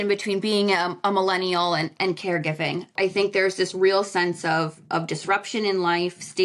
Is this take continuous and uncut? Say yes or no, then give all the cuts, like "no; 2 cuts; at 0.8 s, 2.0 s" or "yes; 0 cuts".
no; 1 cut; at 2.9 s